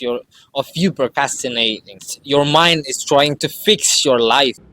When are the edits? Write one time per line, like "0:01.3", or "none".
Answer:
0:02.1

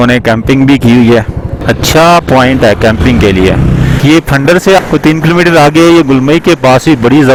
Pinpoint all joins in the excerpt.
none

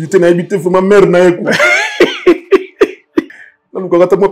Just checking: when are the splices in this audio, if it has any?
0:03.3

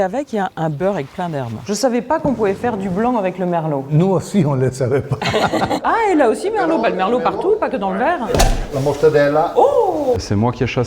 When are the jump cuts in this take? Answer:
0:01.5
0:05.8
0:08.2
0:10.2

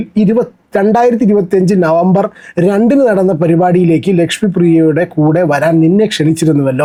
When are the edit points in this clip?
none

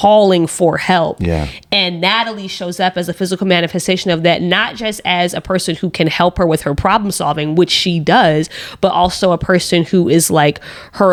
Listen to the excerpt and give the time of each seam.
none

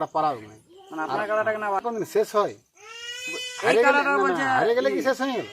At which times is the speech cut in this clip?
0:01.9

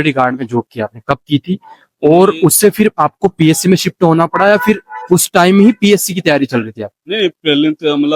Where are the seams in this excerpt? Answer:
none

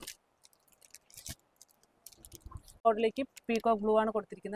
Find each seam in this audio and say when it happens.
0:02.9

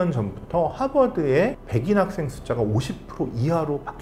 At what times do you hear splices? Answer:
none

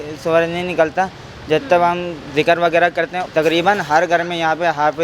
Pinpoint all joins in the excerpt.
0:03.2

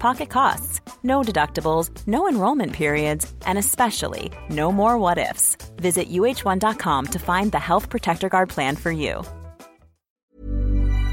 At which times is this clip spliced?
0:10.1

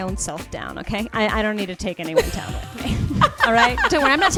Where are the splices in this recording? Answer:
none

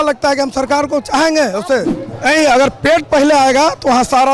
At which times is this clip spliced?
0:02.0

